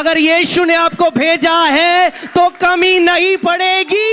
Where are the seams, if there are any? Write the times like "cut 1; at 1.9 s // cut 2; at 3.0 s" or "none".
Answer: none